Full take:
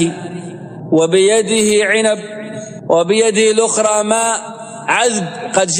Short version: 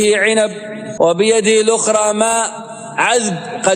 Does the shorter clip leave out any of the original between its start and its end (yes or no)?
yes